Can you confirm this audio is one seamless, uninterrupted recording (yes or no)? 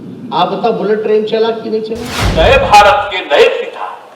no